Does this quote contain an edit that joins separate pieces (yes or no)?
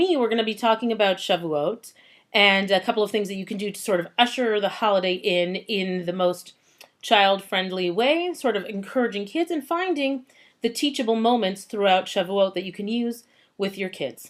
yes